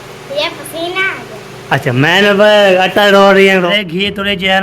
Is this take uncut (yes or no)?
no